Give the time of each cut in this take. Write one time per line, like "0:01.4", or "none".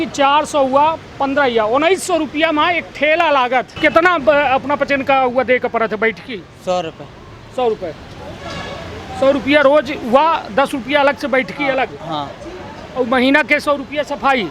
0:03.7